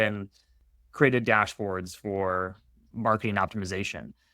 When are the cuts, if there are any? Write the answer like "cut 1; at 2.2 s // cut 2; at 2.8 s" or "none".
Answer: cut 1; at 2.9 s